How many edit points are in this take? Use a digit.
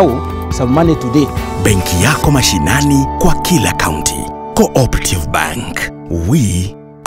1